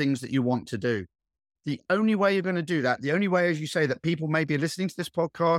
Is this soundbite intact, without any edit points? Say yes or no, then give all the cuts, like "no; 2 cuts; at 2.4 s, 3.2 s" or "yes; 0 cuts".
no; 1 cut; at 1.5 s